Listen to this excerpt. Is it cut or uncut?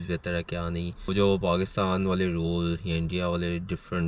cut